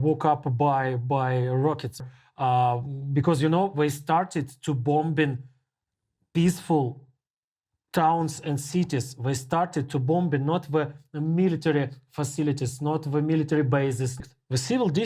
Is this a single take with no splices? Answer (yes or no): no